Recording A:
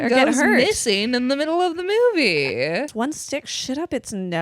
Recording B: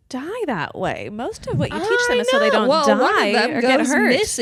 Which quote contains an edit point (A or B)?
A